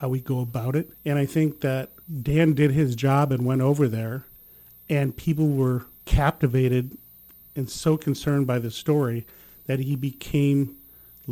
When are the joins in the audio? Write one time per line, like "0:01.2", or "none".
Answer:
0:06.0